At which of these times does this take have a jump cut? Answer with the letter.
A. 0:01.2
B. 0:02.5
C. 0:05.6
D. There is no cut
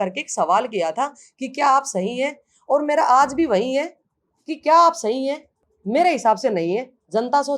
D